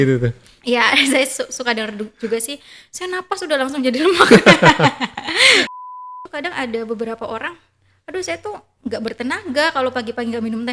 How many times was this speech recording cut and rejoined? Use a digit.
1